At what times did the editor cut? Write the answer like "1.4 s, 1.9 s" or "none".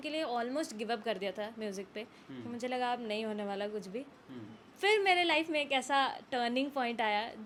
none